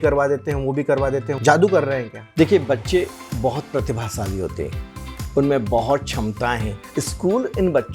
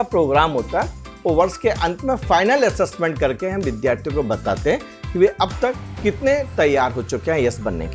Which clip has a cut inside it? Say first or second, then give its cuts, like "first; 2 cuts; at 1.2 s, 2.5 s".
first; 3 cuts; at 1.3 s, 2.2 s, 6.8 s